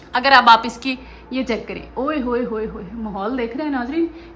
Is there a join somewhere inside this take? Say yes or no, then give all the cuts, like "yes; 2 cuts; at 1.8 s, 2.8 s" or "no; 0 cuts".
no; 0 cuts